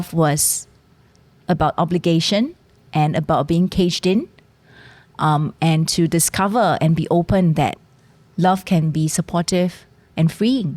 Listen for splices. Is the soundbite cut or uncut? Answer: uncut